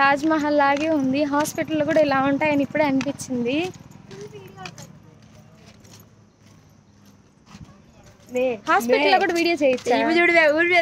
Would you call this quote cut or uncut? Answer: uncut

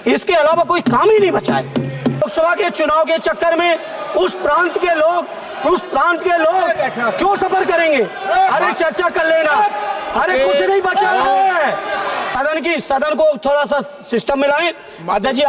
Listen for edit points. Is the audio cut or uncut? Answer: cut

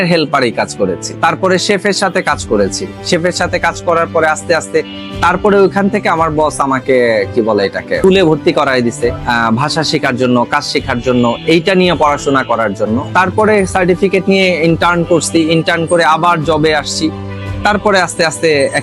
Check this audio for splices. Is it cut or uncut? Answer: uncut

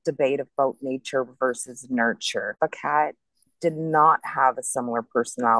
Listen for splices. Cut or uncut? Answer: cut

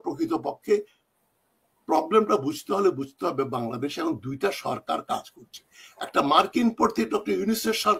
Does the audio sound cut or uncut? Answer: uncut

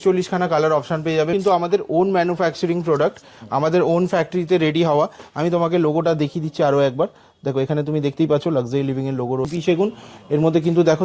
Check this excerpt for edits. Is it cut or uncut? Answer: cut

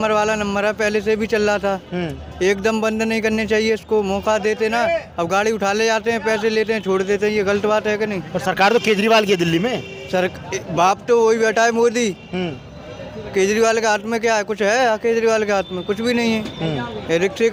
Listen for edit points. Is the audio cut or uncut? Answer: uncut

